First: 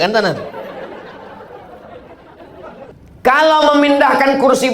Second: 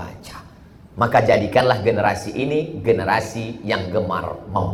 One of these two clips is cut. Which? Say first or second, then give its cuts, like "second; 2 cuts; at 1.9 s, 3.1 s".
first; 1 cut; at 2.9 s